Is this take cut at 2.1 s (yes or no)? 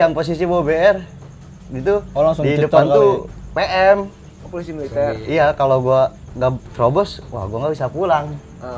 no